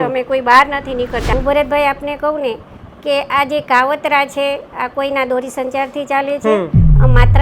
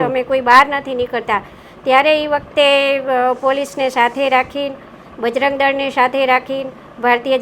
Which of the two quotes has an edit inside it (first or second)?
first